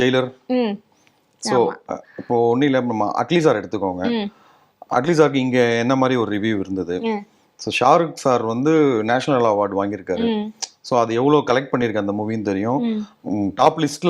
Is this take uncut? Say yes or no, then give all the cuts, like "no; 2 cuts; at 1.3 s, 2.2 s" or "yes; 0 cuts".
yes; 0 cuts